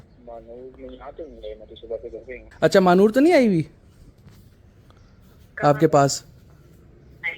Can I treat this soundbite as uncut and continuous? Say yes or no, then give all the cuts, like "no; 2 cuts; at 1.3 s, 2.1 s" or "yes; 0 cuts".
no; 1 cut; at 2.4 s